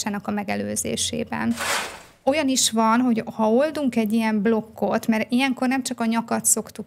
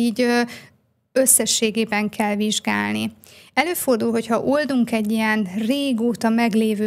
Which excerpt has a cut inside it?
first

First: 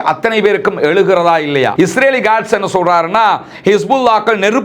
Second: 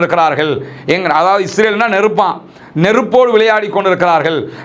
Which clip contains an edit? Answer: first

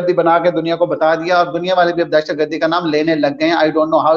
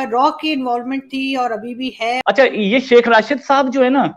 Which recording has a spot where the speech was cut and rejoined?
second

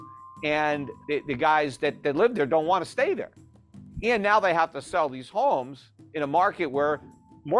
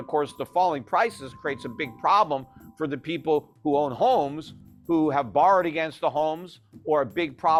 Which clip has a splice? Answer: first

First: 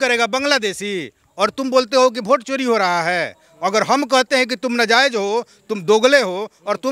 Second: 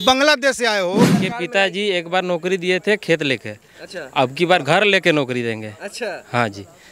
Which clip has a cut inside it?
second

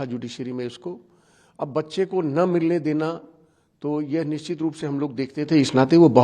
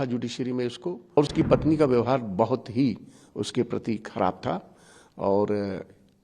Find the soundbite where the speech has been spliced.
second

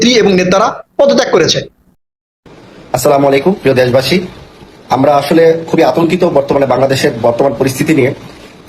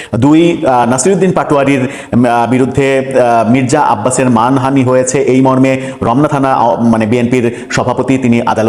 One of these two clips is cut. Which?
first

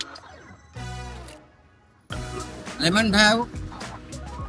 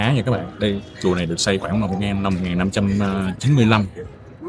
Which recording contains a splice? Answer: first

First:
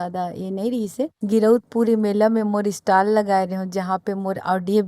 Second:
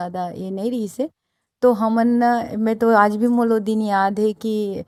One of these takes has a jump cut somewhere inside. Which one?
first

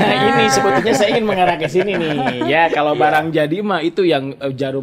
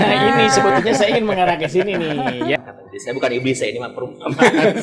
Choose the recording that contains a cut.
second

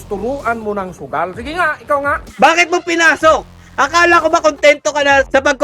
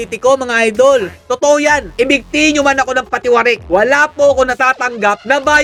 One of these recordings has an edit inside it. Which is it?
first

